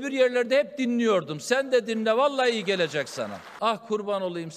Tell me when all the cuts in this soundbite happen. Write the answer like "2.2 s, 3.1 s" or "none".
3.5 s